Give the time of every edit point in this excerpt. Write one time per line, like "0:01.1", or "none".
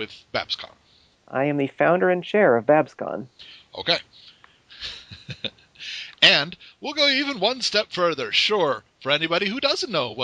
0:05.4